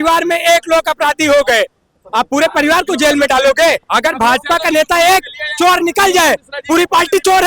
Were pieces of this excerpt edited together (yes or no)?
yes